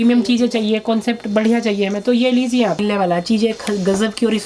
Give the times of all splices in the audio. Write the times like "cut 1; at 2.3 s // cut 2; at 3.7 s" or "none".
cut 1; at 2.8 s

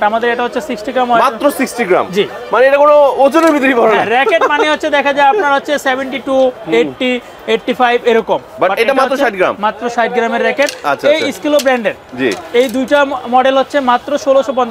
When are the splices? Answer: none

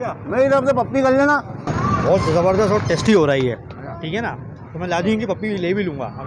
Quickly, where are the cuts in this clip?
cut 1; at 1.7 s

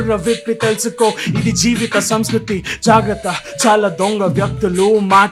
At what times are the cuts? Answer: none

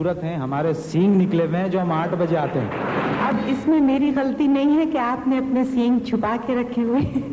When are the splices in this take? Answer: cut 1; at 3.3 s

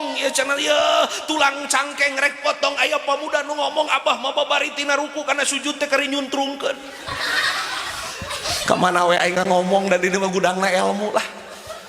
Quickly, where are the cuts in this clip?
none

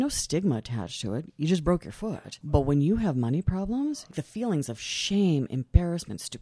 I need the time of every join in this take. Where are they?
cut 1; at 2.4 s // cut 2; at 4.2 s

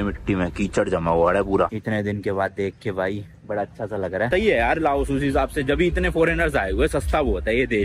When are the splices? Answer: cut 1; at 1.7 s // cut 2; at 4.3 s

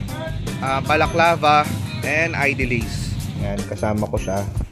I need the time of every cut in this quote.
cut 1; at 3.5 s

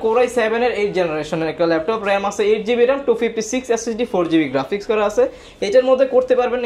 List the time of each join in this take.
none

